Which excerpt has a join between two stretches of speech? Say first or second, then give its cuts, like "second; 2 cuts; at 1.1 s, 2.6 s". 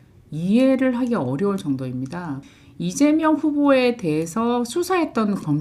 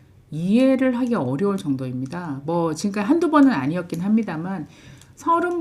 first; 1 cut; at 2.4 s